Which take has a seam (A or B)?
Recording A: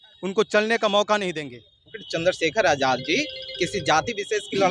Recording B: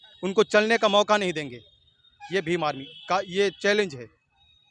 A